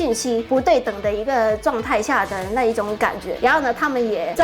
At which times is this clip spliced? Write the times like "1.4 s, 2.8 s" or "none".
3.3 s